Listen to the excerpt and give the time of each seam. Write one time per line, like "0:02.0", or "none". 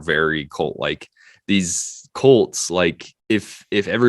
0:03.1